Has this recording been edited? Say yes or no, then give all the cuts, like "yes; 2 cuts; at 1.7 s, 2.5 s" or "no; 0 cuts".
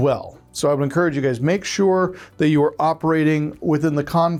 no; 0 cuts